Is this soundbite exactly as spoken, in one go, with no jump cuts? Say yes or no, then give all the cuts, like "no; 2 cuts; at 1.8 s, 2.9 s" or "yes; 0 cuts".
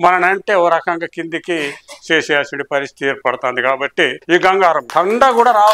no; 2 cuts; at 4.2 s, 4.8 s